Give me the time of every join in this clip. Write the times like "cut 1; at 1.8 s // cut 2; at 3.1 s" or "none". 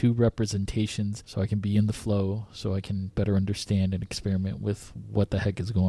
cut 1; at 1.2 s